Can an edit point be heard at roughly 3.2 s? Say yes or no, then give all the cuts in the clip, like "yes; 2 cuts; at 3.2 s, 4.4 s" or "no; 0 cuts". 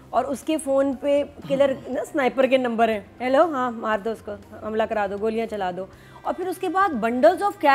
no; 0 cuts